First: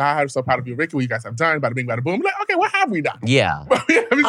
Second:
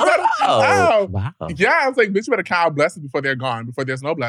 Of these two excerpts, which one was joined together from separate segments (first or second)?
second